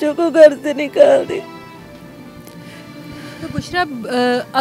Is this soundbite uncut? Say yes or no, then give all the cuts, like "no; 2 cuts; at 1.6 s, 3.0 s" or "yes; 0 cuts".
yes; 0 cuts